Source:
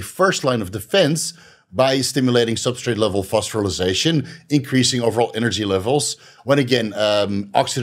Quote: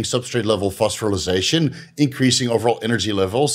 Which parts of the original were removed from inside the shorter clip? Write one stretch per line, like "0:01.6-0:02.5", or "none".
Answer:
none